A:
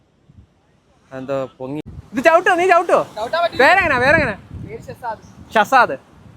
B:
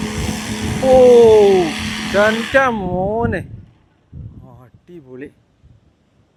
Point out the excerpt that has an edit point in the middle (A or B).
A